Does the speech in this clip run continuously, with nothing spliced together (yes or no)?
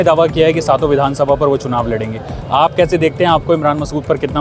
yes